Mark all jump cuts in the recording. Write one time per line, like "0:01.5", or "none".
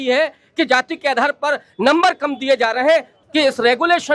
0:03.1